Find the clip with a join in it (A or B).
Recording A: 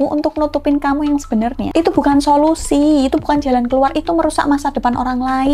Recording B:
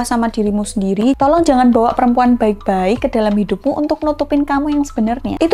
B